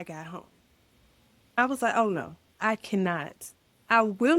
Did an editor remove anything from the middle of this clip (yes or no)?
yes